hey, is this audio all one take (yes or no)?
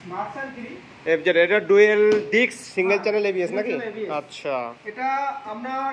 yes